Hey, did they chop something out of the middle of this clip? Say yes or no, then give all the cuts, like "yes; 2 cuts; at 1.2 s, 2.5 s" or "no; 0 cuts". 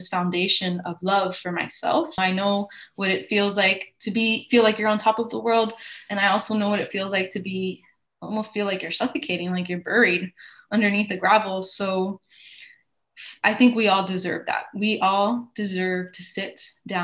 yes; 1 cut; at 2.2 s